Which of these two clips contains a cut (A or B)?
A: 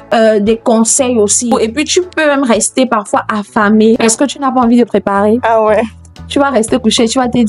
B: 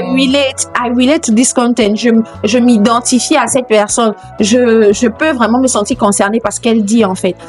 A